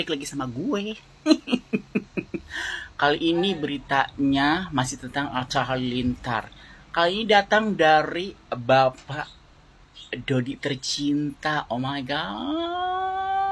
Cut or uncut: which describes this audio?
uncut